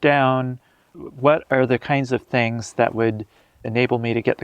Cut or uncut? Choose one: cut